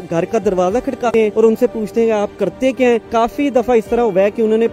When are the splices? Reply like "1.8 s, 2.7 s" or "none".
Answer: 1.1 s, 3.0 s